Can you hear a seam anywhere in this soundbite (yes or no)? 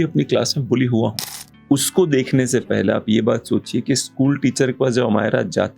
yes